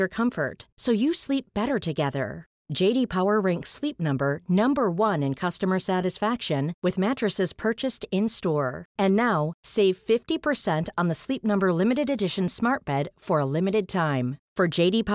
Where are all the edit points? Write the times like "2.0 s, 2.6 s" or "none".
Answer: none